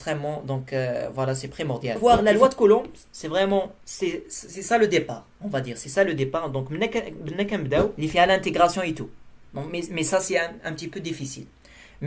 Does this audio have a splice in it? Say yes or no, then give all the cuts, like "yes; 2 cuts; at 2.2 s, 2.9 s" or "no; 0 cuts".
yes; 2 cuts; at 2.0 s, 8.0 s